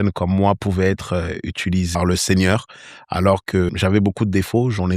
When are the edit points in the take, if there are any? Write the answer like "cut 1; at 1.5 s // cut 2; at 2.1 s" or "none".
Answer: cut 1; at 1.9 s // cut 2; at 3.7 s